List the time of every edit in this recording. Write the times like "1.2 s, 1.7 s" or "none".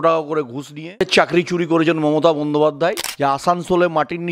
1.0 s, 3.1 s